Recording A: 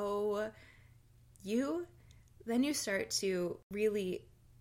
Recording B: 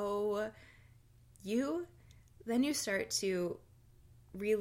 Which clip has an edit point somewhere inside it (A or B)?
A